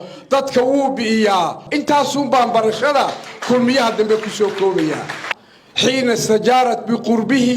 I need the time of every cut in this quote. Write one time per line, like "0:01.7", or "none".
0:05.2